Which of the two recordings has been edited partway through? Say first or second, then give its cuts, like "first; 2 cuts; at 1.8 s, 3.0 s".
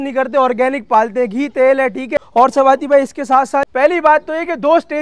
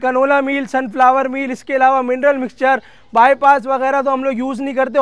first; 2 cuts; at 2.2 s, 3.7 s